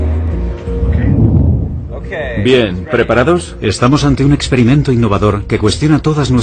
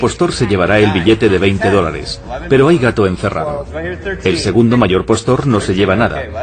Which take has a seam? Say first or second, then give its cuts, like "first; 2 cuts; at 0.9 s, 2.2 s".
first; 1 cut; at 1.6 s